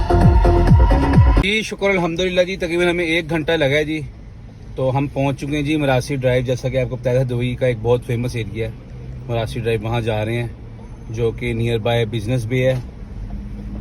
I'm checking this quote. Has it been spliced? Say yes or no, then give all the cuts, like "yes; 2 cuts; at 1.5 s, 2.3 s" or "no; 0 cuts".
no; 0 cuts